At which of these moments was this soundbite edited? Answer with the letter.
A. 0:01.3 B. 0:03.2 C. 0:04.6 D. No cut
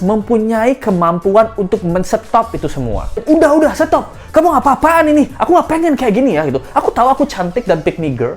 B